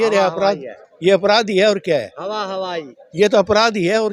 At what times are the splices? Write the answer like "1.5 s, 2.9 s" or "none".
none